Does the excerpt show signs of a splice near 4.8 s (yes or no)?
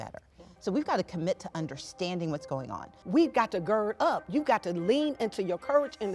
no